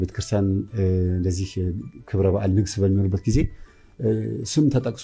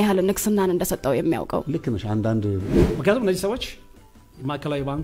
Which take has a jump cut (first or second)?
second